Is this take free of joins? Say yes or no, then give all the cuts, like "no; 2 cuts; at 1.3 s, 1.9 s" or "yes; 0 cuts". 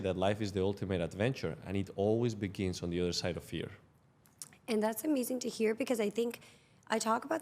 yes; 0 cuts